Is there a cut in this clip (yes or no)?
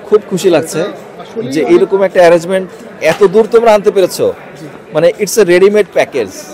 no